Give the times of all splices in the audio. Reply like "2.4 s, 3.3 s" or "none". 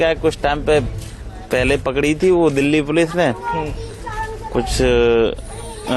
none